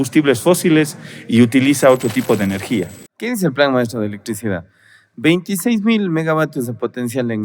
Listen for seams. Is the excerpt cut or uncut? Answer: cut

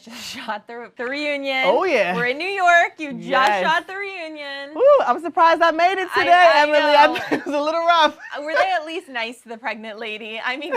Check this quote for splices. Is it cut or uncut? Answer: cut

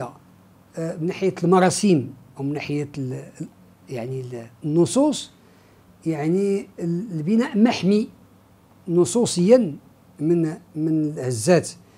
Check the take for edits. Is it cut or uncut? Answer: uncut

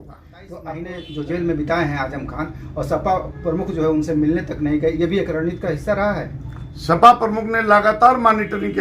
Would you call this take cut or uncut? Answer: cut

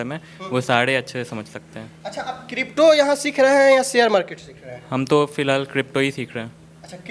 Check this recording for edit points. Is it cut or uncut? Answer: uncut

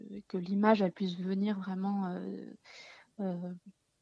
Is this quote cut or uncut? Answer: uncut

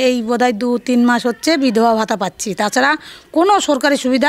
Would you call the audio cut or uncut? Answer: uncut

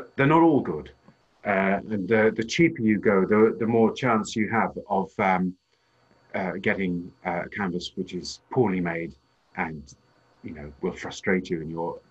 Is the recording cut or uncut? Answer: uncut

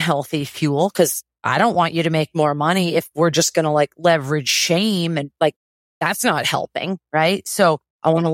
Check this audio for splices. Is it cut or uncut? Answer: cut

